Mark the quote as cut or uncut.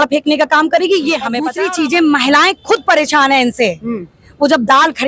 cut